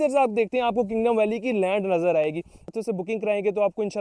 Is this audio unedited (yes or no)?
no